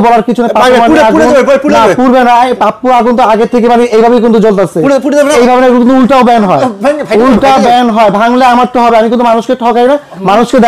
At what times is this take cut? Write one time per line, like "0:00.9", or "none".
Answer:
0:05.3